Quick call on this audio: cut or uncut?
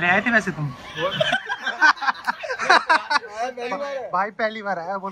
uncut